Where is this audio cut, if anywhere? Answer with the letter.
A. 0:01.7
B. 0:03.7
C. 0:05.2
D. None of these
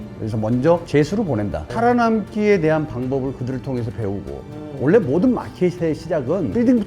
A